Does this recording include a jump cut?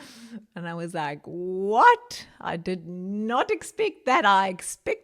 no; 0 cuts

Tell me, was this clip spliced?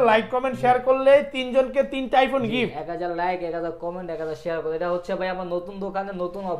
no; 0 cuts

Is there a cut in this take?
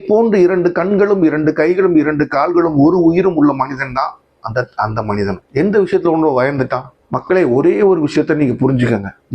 yes; 1 cut; at 7.0 s

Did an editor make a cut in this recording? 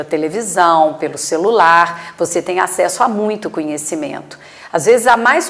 no; 0 cuts

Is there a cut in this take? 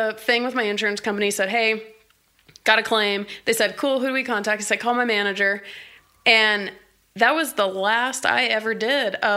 no; 0 cuts

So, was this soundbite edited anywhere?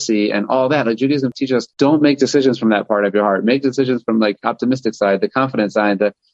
no; 0 cuts

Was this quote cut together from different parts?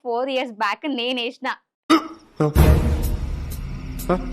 no; 0 cuts

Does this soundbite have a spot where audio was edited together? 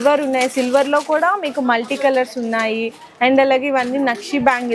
no; 0 cuts

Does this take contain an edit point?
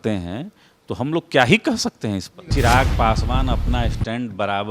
yes; 1 cut; at 2.5 s

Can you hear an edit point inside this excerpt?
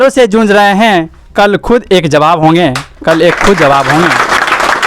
no; 0 cuts

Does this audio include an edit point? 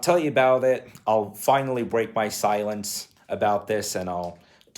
no; 0 cuts

